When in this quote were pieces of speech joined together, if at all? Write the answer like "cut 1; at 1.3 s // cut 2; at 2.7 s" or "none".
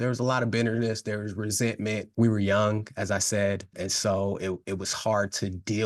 cut 1; at 2.1 s // cut 2; at 3.7 s